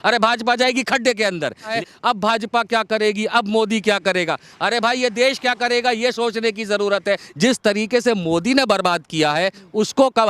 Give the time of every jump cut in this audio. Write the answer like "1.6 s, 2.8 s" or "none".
1.7 s, 7.3 s